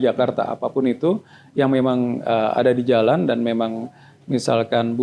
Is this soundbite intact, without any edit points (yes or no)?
yes